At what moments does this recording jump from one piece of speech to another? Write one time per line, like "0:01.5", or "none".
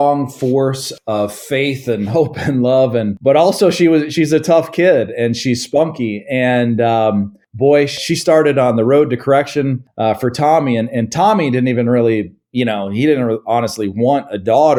none